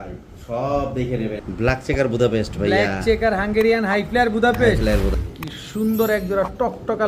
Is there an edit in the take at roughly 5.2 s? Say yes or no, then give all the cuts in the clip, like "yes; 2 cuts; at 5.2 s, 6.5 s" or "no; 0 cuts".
yes; 2 cuts; at 1.4 s, 5.2 s